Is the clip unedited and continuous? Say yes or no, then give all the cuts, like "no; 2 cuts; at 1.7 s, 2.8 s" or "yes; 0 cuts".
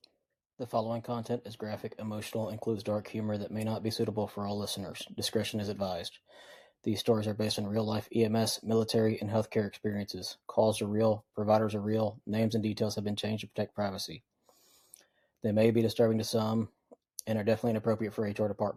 yes; 0 cuts